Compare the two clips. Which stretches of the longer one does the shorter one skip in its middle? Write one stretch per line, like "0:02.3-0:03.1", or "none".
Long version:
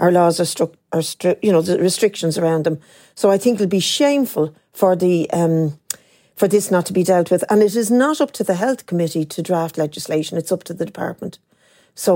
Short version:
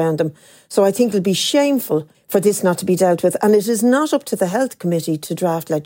0:04.6-0:06.2